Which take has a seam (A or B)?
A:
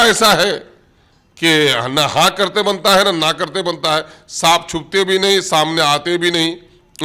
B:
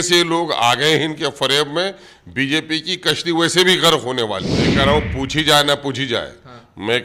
B